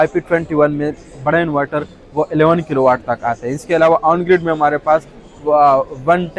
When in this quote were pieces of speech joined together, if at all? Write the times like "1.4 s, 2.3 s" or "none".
none